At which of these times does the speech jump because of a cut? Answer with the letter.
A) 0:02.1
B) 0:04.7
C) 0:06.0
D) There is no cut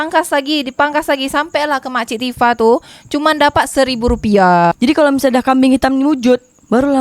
B